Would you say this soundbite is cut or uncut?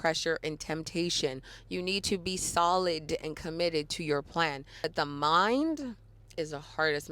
cut